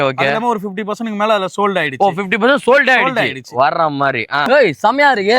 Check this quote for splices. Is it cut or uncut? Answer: cut